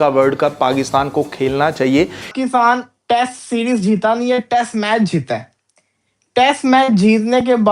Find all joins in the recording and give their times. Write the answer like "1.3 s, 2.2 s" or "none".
2.3 s